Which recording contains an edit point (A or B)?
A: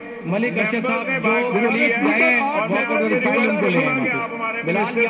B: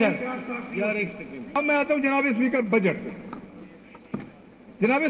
B